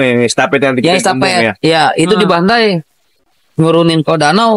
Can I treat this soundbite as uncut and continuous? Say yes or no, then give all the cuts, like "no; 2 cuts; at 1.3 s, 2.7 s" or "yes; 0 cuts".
yes; 0 cuts